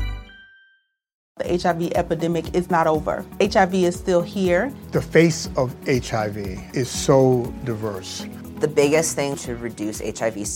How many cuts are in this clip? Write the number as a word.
one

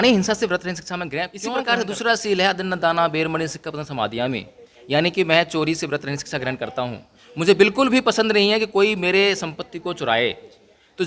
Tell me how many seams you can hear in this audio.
one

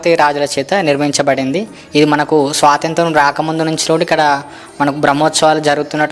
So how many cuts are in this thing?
zero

